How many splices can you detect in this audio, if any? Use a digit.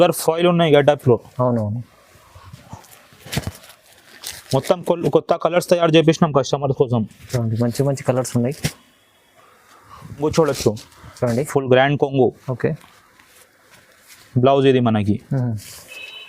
1